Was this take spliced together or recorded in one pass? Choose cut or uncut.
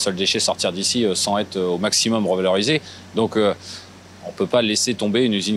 uncut